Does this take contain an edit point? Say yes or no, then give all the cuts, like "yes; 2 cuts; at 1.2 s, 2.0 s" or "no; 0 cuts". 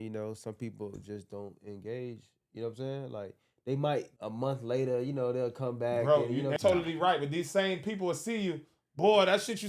yes; 2 cuts; at 4.2 s, 6.6 s